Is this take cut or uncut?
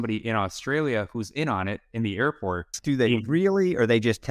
cut